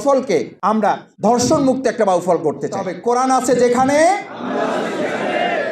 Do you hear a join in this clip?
yes; 1 cut; at 2.9 s

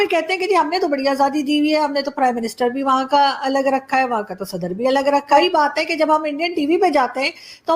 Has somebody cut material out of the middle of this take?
yes; 1 cut; at 5.3 s

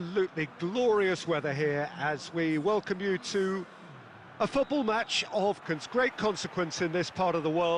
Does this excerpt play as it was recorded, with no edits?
no; 1 cut; at 5.8 s

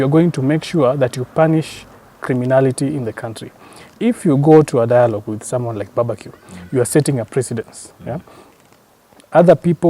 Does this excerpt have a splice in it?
no; 0 cuts

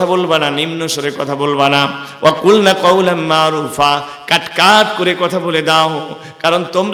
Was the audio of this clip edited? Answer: no; 0 cuts

